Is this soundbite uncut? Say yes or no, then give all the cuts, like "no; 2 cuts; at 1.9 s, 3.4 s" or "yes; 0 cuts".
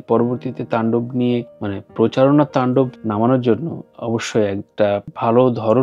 yes; 0 cuts